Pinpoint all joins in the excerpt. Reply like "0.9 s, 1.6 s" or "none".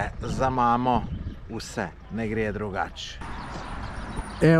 none